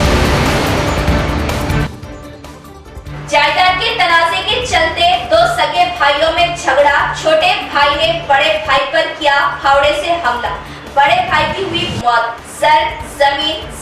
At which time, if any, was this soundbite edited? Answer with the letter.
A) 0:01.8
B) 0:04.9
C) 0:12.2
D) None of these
A